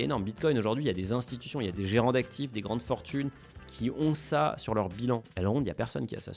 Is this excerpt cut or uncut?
cut